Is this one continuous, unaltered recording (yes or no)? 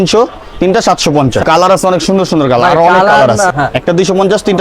no